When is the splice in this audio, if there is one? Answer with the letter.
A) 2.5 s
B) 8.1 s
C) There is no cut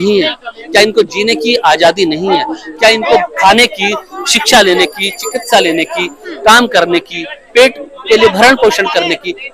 C